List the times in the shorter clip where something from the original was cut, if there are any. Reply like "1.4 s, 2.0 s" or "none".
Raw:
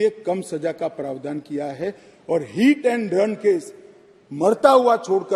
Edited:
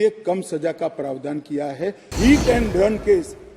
2.1 s